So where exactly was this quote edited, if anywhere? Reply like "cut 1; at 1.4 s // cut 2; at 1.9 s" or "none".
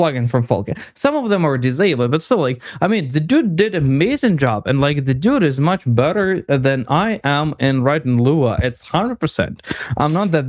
none